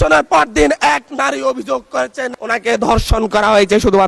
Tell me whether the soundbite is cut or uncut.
uncut